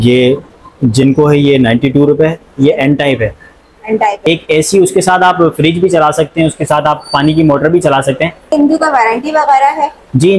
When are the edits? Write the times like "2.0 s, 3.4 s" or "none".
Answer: 4.2 s, 8.5 s